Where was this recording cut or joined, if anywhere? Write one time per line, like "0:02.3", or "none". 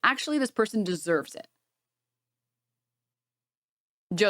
none

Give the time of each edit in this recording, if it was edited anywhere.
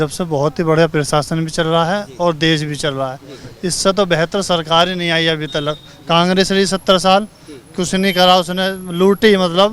none

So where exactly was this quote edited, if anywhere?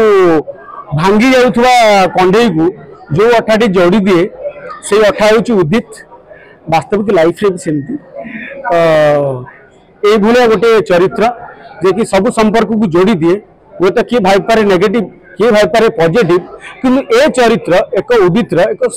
none

